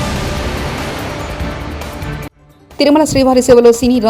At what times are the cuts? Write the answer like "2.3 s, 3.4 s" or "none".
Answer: 2.4 s